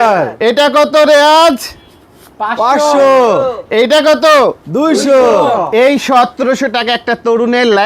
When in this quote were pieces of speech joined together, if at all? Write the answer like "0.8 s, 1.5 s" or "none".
none